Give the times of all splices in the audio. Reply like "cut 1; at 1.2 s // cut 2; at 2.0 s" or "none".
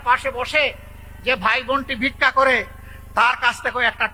none